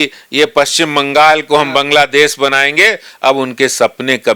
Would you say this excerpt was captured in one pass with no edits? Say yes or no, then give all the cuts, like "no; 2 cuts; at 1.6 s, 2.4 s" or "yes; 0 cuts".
yes; 0 cuts